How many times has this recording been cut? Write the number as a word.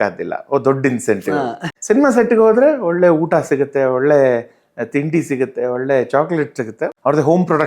two